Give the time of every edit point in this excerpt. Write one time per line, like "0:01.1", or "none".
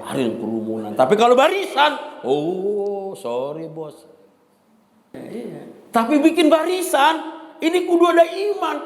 0:05.1